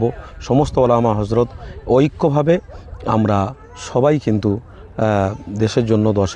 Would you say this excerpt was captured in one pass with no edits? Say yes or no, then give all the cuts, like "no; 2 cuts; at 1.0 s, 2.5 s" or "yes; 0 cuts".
yes; 0 cuts